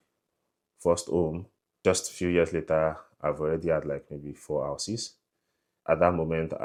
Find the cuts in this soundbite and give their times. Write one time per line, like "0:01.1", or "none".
none